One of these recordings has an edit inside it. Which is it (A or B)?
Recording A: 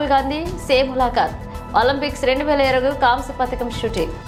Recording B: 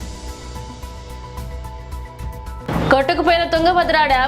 B